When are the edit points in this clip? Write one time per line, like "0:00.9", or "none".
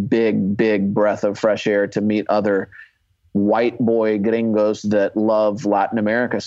none